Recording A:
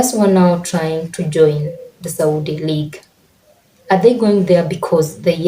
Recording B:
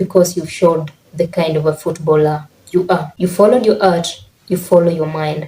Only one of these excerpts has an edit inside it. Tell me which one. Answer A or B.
B